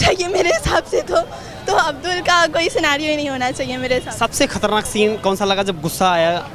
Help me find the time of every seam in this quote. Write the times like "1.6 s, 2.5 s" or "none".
none